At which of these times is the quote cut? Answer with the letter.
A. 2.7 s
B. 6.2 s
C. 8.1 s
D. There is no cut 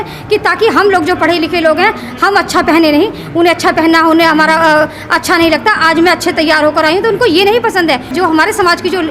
C